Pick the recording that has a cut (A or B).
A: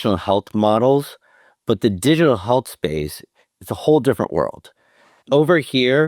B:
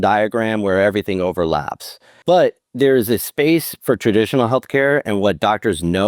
B